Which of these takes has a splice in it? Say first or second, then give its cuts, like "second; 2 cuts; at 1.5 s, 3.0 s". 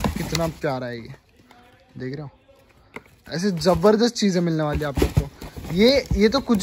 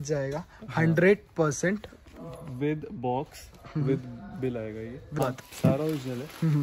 second; 1 cut; at 5.2 s